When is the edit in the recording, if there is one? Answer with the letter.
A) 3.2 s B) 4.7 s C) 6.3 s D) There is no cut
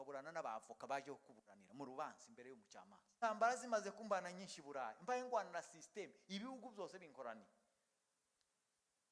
A